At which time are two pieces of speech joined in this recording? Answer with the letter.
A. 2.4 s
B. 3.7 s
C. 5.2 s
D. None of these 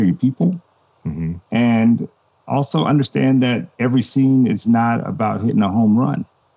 B